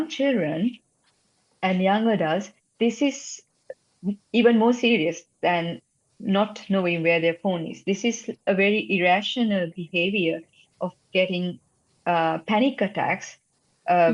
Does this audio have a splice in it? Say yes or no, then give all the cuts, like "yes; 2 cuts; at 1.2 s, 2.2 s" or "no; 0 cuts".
no; 0 cuts